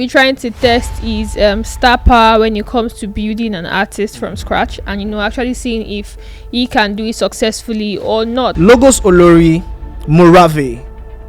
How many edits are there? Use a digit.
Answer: 1